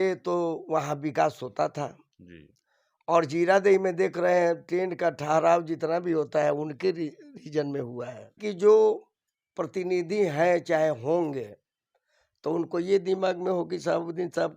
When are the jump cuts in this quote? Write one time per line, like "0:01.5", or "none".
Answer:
0:08.4